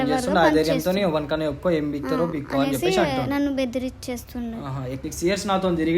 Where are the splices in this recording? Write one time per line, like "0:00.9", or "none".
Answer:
0:05.0